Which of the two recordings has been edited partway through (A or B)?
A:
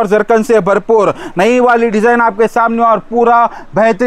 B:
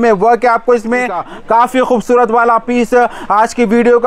B